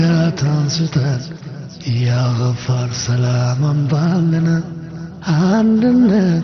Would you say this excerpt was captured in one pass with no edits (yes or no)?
yes